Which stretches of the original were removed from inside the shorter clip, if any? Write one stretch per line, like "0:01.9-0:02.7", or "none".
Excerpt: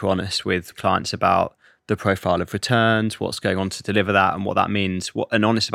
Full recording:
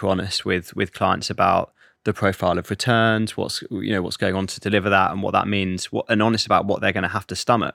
0:00.7-0:00.9
0:03.5-0:04.1